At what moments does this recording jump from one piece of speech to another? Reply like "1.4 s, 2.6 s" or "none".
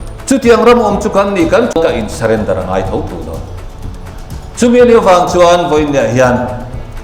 1.7 s

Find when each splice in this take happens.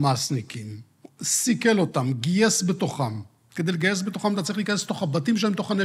none

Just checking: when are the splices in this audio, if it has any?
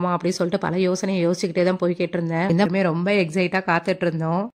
2.7 s

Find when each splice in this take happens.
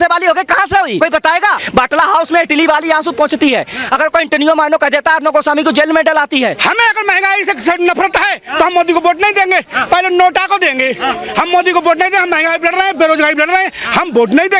1.4 s, 6.6 s

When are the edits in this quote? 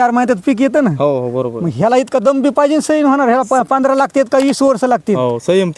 none

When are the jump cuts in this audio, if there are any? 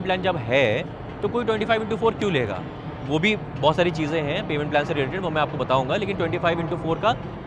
none

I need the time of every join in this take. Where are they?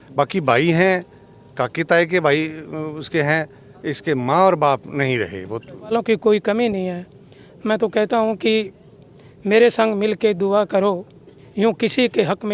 5.9 s

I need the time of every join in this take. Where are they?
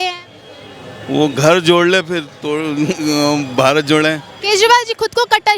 4.3 s

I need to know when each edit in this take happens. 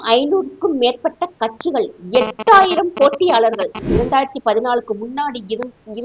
3.8 s

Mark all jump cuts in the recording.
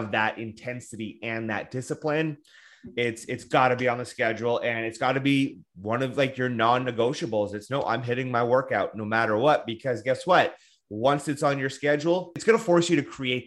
12.4 s

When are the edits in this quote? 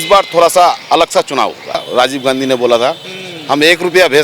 1.8 s

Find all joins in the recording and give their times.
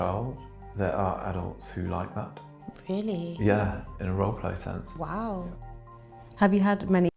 none

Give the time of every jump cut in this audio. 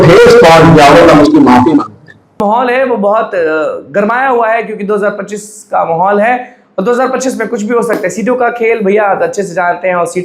2.4 s

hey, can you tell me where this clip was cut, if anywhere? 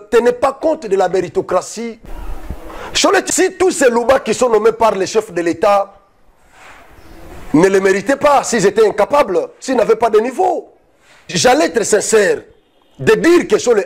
none

